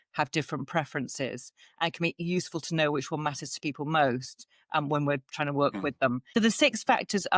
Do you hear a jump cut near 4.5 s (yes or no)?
no